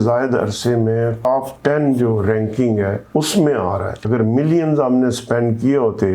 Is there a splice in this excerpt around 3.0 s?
yes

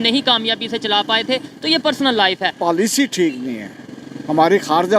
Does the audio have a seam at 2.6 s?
yes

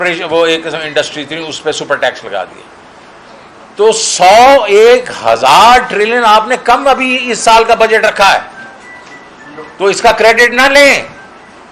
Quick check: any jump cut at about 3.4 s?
no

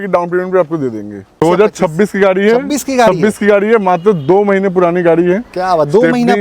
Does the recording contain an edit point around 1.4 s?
yes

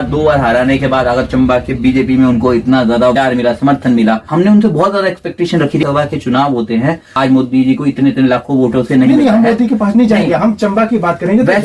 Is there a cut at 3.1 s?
yes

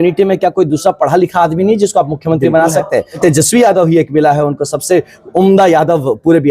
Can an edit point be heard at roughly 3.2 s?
yes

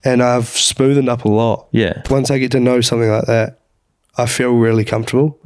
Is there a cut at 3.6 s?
no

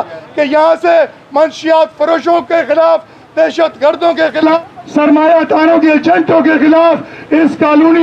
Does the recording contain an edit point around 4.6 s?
yes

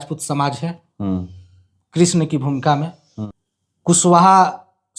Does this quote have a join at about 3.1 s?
yes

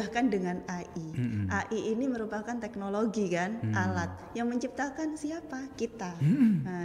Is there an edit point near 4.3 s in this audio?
no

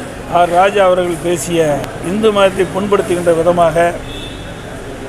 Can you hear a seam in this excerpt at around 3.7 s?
no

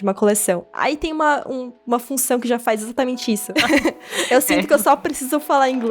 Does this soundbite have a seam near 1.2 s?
no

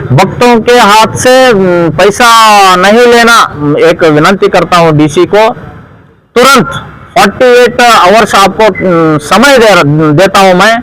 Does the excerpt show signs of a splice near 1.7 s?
no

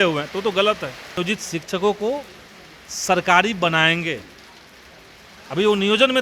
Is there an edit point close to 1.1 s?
yes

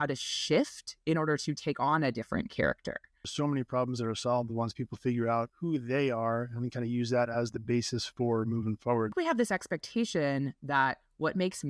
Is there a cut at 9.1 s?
yes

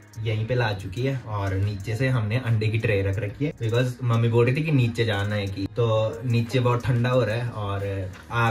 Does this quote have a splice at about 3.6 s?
no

